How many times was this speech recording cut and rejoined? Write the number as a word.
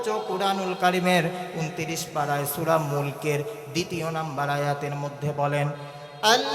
zero